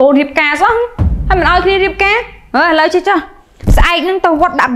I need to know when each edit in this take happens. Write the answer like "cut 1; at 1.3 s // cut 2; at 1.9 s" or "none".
none

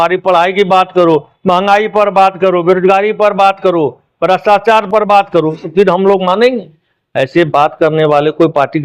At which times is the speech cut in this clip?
none

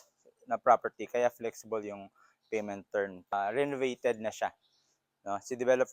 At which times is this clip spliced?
cut 1; at 3.3 s

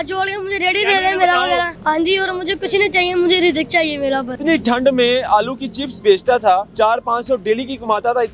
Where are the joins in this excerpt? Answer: cut 1; at 1.7 s // cut 2; at 4.4 s // cut 3; at 6.7 s

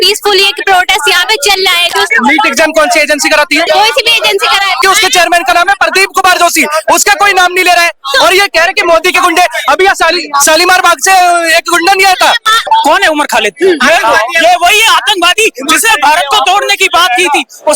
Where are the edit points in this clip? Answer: cut 1; at 2.1 s // cut 2; at 3.7 s // cut 3; at 4.8 s // cut 4; at 12.6 s

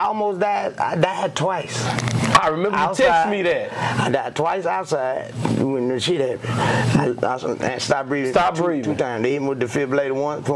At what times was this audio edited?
none

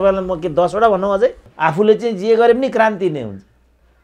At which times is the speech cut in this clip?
cut 1; at 1.5 s

